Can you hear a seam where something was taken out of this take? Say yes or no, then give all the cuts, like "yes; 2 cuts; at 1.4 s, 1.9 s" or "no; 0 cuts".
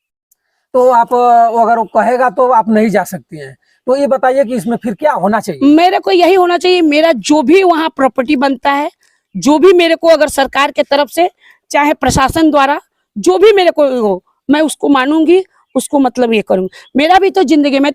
no; 0 cuts